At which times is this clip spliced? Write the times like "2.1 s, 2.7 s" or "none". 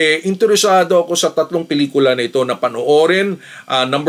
none